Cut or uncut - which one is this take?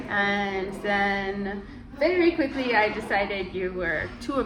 uncut